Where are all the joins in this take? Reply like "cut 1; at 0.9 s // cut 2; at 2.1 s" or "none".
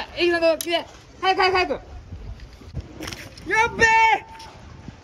cut 1; at 2.8 s

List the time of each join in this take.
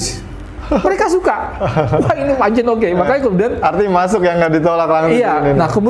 none

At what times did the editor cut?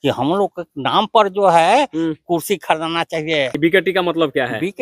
cut 1; at 3.6 s

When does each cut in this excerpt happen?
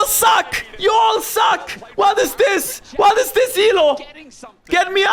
none

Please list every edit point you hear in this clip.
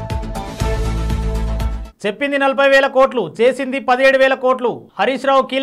cut 1; at 1.7 s

